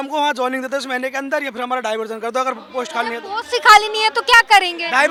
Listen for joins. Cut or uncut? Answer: uncut